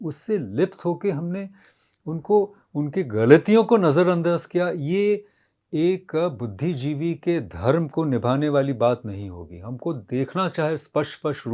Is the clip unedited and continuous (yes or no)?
yes